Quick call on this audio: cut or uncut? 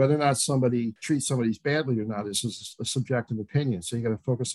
cut